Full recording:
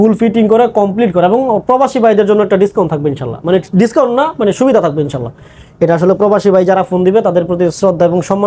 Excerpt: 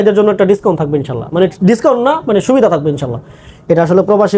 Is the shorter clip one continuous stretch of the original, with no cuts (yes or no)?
yes